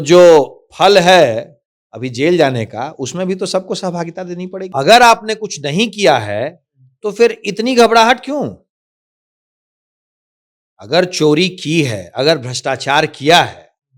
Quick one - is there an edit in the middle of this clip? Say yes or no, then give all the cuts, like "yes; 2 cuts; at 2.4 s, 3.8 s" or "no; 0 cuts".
yes; 1 cut; at 4.7 s